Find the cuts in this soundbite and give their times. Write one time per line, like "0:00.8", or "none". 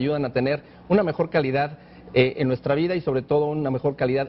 none

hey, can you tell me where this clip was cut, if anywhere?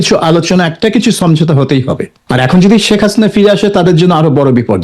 0:02.1

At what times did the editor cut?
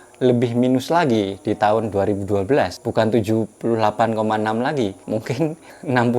0:02.8
0:05.3

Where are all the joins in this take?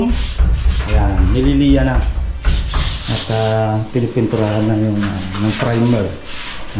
none

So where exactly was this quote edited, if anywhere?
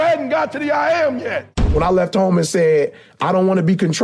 0:01.7

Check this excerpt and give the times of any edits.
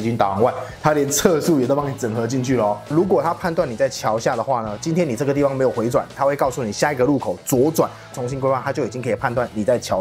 0:03.0
0:08.1

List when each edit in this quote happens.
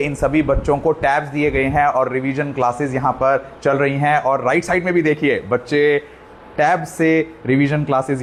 none

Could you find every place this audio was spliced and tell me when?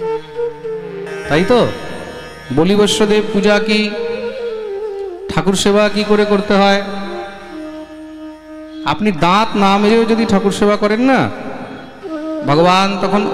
none

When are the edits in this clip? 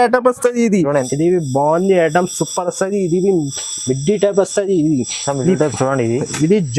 0:01.1

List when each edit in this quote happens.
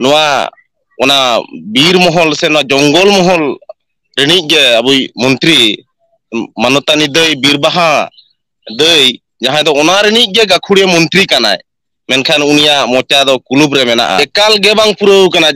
0:14.2

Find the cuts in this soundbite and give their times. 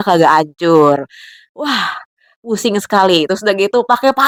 none

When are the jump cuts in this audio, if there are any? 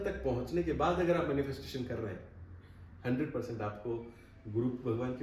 none

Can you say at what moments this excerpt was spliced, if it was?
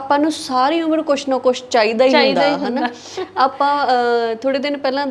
none

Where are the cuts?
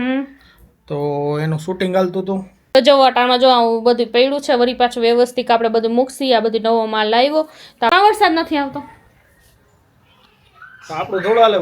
0:02.5
0:07.9

